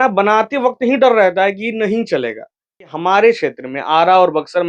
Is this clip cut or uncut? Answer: cut